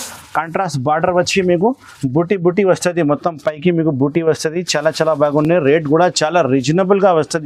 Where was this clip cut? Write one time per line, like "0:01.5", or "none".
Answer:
none